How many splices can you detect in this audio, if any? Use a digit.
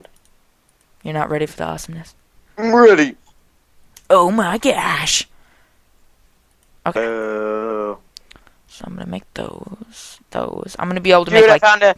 1